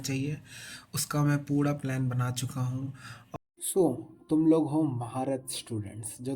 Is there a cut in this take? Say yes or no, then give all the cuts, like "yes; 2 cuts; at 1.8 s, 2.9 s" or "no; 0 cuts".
yes; 1 cut; at 3.4 s